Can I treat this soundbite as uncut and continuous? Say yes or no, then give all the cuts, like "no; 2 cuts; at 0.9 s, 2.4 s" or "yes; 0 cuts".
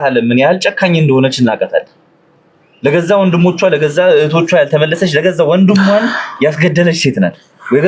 yes; 0 cuts